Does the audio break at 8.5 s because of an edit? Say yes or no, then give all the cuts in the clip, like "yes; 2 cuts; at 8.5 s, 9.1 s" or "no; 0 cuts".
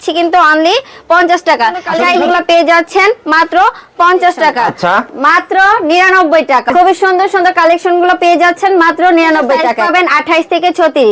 no; 4 cuts; at 2.3 s, 4.7 s, 6.7 s, 9.8 s